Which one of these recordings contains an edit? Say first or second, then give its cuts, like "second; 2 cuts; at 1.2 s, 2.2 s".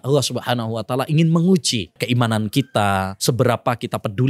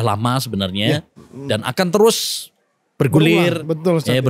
first; 2 cuts; at 2.0 s, 3.1 s